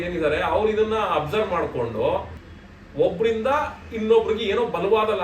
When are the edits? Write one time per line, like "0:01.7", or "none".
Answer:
0:02.4